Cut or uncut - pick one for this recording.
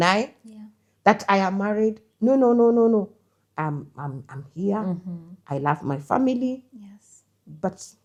uncut